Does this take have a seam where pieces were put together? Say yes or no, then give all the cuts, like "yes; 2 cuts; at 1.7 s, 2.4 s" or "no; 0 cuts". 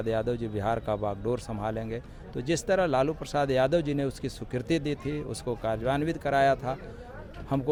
no; 0 cuts